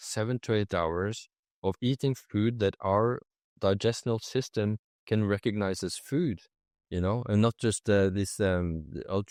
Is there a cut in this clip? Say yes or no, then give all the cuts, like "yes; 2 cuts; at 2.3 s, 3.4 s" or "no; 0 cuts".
no; 0 cuts